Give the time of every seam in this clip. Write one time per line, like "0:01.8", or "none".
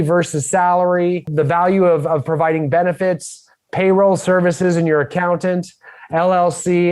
0:01.3